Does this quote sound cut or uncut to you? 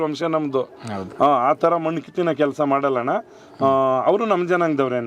uncut